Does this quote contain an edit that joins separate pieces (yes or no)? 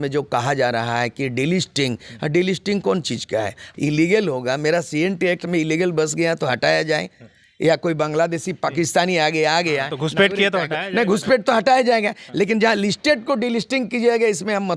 yes